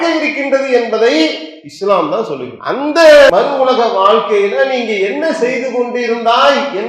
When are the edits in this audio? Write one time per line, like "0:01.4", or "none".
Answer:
0:02.5
0:03.3